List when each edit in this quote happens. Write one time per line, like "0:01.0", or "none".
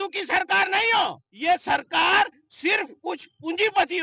0:01.3